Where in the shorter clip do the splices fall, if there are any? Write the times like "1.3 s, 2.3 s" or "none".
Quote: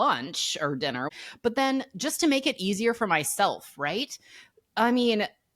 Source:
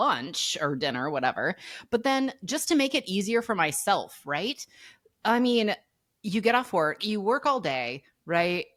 1.1 s

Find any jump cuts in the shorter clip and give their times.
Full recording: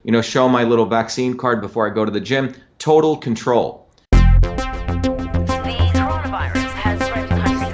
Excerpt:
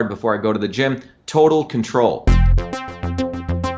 2.2 s

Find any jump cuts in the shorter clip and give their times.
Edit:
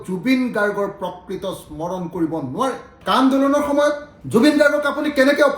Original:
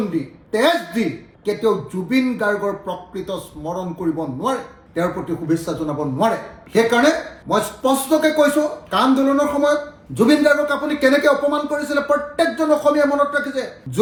3.0 s

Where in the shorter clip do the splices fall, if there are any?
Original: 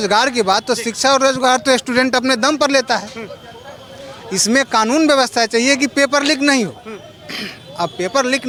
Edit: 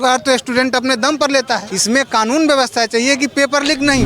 1.7 s

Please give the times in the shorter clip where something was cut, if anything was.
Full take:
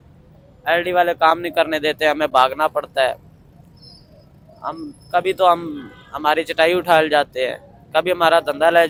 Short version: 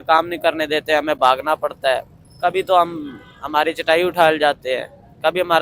2.2 s

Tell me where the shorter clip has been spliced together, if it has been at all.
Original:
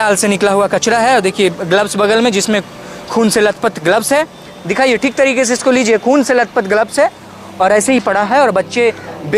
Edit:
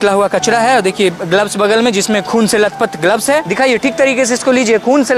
2.2 s, 3.5 s

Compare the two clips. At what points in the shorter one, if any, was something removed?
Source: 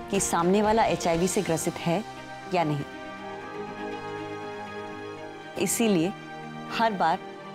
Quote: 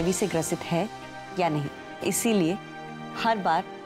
1.8 s

